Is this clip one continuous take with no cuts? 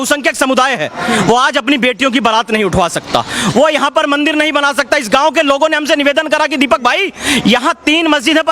yes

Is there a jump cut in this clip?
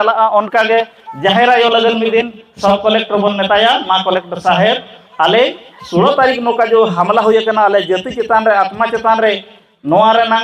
no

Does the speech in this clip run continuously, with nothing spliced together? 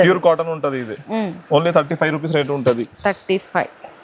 yes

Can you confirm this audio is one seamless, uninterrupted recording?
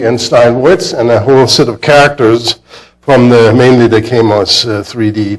no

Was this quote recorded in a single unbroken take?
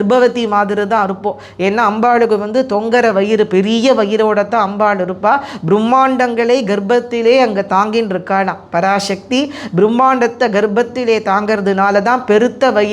yes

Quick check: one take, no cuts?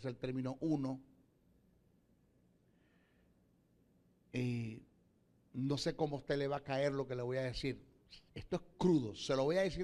yes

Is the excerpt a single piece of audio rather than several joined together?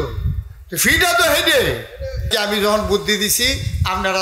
no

